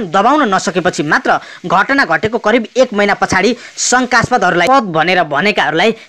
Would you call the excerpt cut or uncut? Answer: cut